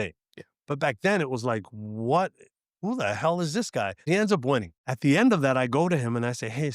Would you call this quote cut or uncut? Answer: cut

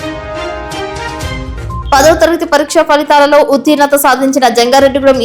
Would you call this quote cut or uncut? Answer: cut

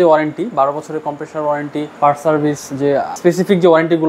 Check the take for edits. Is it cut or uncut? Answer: cut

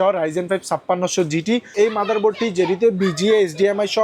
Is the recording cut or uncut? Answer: cut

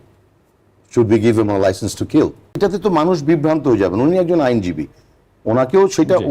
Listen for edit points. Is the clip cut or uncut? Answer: cut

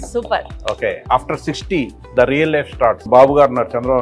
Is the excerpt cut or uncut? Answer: cut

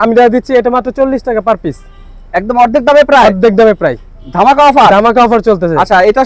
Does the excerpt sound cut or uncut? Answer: uncut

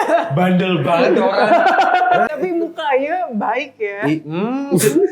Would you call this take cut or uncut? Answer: cut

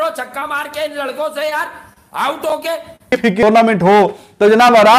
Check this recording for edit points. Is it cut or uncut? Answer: cut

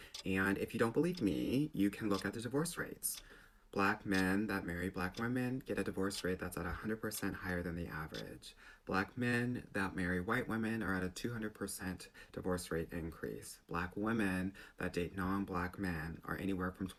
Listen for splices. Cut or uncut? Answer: uncut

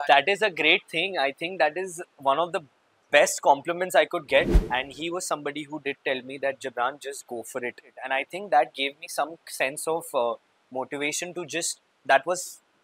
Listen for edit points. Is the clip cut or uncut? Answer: cut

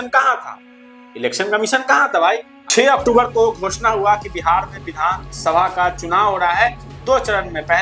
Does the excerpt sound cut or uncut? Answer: uncut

